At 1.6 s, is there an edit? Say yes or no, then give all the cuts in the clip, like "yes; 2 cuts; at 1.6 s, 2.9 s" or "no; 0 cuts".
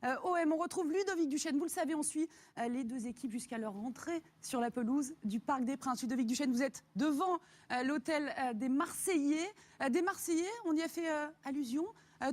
yes; 1 cut; at 1.6 s